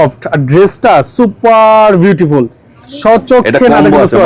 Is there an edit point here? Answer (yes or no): no